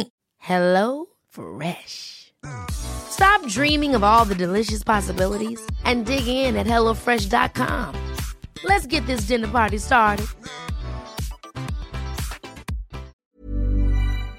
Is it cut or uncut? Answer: cut